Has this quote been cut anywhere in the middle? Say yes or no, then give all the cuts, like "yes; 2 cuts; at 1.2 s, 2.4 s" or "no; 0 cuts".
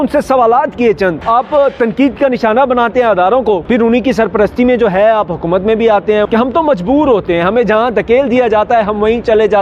yes; 3 cuts; at 1.2 s, 3.6 s, 6.3 s